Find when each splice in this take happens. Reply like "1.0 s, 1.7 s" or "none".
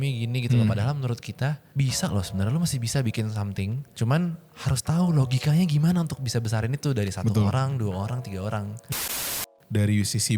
1.6 s, 3.9 s, 9.1 s